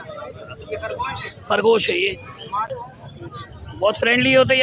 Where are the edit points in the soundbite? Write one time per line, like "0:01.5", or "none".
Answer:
0:02.7